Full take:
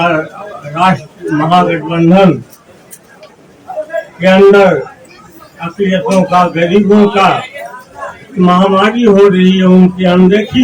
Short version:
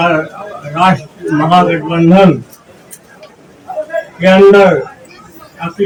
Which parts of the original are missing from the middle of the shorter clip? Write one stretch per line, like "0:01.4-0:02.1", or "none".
none